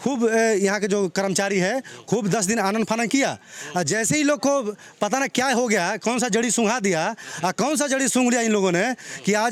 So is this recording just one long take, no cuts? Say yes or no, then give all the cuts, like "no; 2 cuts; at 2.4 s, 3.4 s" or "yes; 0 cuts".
yes; 0 cuts